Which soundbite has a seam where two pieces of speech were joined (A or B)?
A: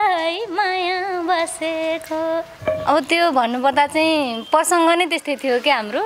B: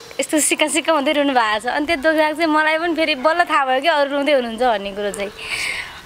A